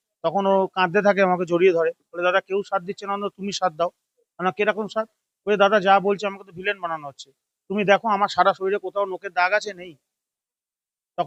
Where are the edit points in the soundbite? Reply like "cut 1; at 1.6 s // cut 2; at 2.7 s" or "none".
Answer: none